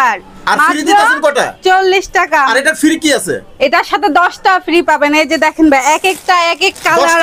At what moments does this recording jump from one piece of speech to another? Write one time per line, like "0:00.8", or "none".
none